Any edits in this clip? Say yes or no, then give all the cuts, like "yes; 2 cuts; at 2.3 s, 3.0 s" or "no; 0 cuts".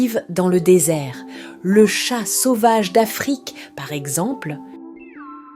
yes; 1 cut; at 4.5 s